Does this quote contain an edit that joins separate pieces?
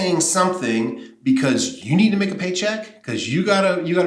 no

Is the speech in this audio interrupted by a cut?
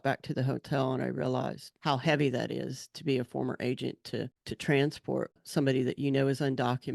yes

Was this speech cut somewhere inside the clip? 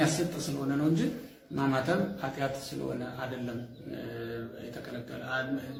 no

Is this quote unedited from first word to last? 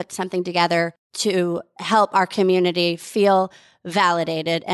no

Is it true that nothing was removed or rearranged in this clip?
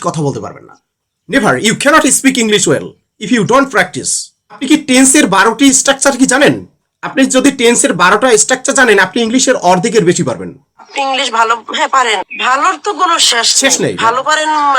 no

